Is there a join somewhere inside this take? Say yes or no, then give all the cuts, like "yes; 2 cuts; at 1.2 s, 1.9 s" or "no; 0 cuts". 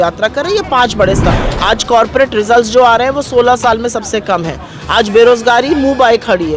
yes; 1 cut; at 1.3 s